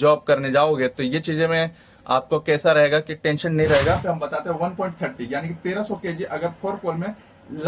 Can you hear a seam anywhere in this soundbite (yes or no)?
yes